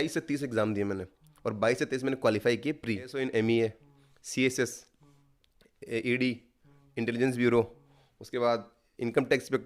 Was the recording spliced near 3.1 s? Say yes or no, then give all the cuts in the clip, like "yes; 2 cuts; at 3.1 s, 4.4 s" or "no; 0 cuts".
yes; 1 cut; at 3.1 s